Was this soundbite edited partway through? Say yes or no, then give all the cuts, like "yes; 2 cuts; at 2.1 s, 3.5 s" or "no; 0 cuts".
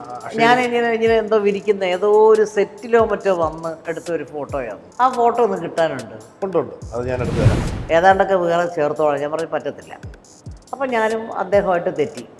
yes; 1 cut; at 7.6 s